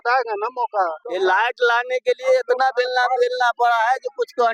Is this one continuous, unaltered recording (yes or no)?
no